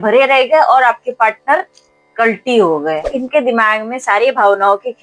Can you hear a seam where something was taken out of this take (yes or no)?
yes